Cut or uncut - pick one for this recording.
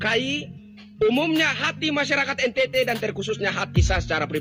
uncut